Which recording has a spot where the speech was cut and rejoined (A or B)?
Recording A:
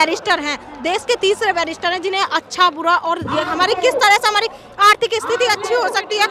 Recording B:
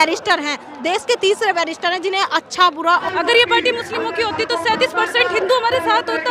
B